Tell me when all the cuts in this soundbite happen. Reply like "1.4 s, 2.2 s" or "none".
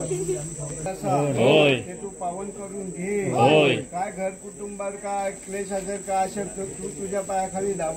none